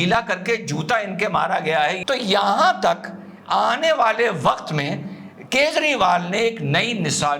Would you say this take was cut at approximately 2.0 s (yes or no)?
yes